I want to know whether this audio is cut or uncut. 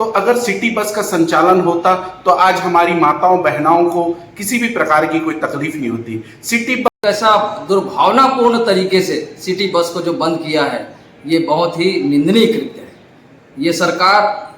cut